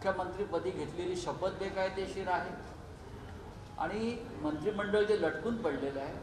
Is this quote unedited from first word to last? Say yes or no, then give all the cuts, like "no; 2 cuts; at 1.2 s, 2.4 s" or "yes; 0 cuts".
yes; 0 cuts